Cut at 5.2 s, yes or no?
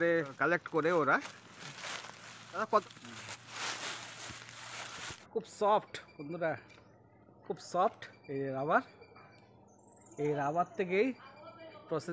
yes